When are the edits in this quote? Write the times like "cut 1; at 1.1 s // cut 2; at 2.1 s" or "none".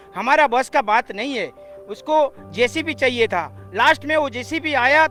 none

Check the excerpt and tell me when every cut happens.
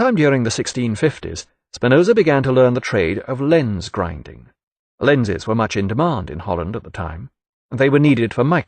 cut 1; at 2.7 s

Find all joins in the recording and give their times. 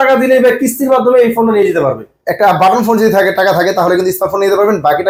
none

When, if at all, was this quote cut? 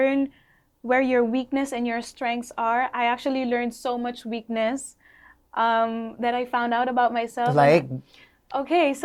none

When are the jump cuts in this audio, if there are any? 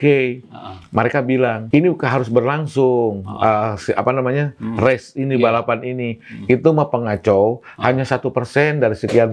cut 1; at 1.6 s

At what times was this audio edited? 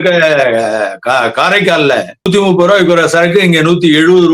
cut 1; at 2.3 s

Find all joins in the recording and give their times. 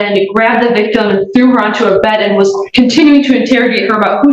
none

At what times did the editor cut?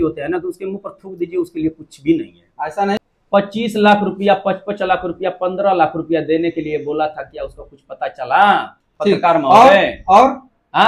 cut 1; at 3.0 s

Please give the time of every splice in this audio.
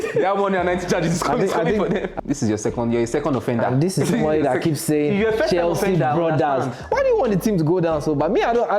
cut 1; at 2.1 s

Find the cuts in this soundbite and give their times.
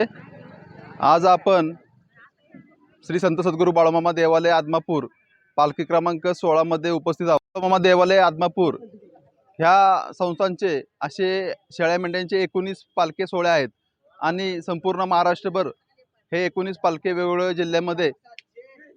cut 1; at 7.4 s

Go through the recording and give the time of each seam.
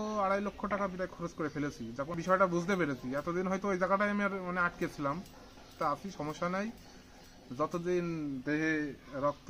cut 1; at 2.2 s // cut 2; at 5.7 s

